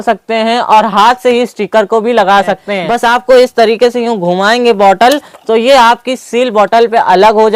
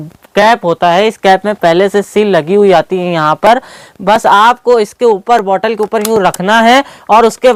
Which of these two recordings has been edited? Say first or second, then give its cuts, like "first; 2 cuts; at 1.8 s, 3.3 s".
first; 1 cut; at 2.6 s